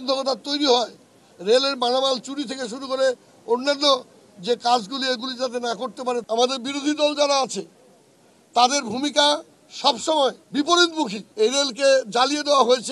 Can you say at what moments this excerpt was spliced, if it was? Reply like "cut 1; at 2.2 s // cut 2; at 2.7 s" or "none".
cut 1; at 6.2 s // cut 2; at 10.4 s // cut 3; at 11.2 s